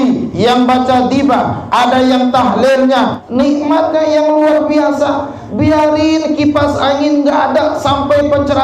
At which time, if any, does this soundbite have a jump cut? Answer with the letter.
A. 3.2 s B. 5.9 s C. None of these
A